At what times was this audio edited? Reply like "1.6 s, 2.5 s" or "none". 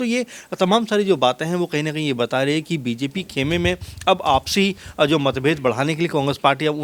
none